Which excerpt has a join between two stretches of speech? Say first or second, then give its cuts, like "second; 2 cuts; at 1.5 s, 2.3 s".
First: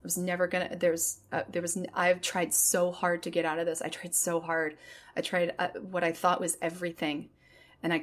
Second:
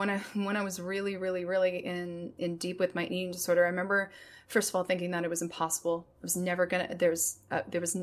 second; 1 cut; at 2.3 s